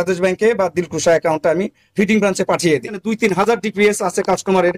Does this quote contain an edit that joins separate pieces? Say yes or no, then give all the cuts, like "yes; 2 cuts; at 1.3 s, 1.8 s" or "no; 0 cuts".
yes; 1 cut; at 3.1 s